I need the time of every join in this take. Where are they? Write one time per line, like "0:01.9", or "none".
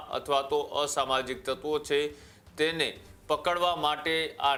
none